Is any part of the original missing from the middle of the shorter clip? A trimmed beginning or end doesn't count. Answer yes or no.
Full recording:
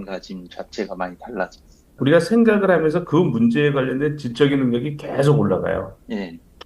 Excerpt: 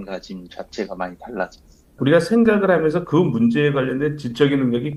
no